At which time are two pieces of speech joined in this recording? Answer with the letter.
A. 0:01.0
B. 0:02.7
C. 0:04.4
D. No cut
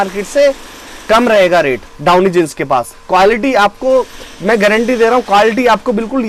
D